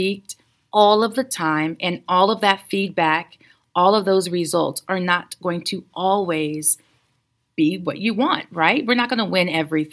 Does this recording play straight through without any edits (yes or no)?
yes